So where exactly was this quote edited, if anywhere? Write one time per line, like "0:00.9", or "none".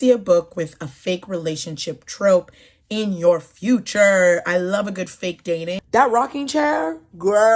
0:05.8

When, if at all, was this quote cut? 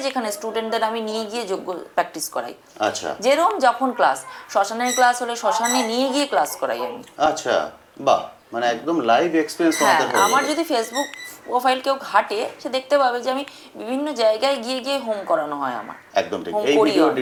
none

